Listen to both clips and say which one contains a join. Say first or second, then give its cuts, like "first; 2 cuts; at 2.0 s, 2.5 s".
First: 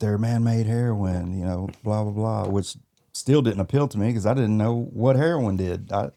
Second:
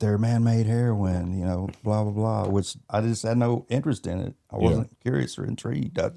second; 1 cut; at 2.8 s